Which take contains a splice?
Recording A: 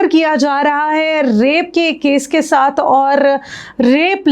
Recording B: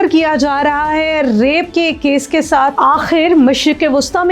B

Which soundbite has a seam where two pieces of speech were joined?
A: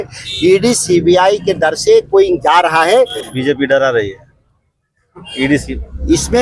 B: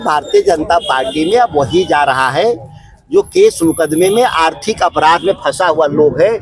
A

